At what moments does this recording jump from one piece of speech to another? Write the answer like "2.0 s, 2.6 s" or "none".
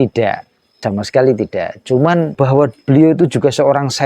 0.8 s, 2.3 s